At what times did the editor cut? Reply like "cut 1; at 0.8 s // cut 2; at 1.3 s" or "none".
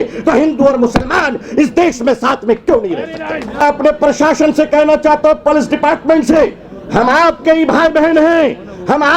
cut 1; at 3.6 s